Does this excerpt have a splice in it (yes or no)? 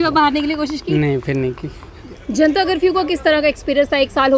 no